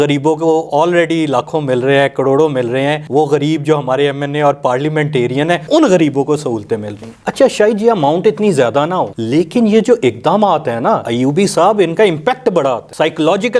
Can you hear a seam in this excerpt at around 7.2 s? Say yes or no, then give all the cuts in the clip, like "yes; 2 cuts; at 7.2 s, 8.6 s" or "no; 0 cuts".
no; 0 cuts